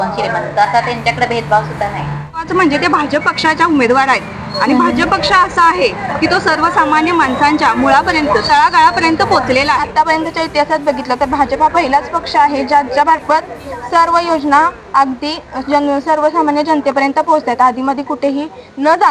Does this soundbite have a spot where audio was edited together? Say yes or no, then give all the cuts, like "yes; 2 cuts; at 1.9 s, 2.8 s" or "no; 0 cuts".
yes; 2 cuts; at 2.5 s, 9.9 s